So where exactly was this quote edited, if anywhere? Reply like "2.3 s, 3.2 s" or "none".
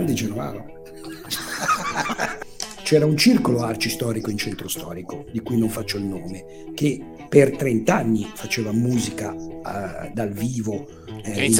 2.4 s